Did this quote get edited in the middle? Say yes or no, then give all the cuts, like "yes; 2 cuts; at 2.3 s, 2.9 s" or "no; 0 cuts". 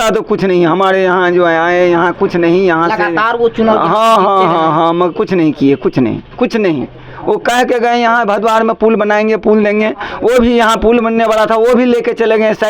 no; 0 cuts